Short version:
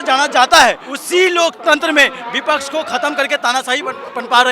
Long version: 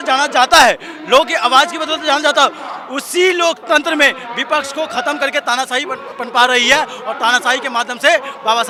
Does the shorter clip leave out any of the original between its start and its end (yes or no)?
yes